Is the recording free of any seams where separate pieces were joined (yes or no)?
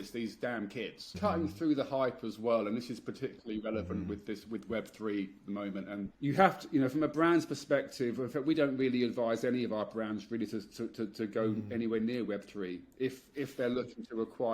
no